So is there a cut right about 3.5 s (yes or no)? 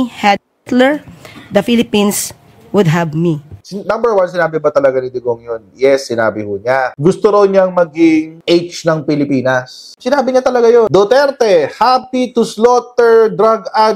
yes